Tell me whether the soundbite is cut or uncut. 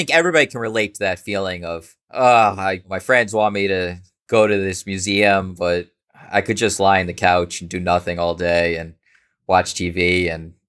uncut